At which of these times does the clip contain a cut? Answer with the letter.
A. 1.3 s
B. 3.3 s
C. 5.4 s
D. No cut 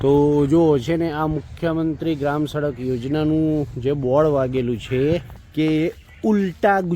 C